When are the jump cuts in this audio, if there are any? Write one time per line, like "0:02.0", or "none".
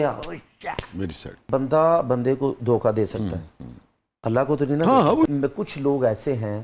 0:01.4
0:05.3